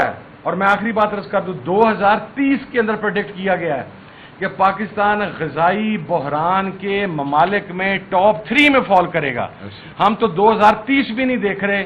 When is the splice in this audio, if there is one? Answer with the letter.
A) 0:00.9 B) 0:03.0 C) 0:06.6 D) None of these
D